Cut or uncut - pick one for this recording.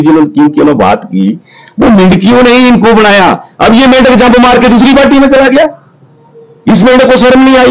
uncut